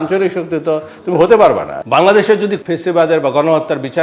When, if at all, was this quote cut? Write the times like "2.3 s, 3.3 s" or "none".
1.7 s, 2.6 s